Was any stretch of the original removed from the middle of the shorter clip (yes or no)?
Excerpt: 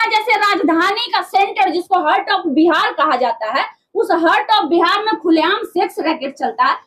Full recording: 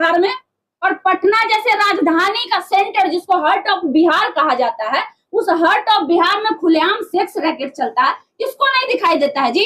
no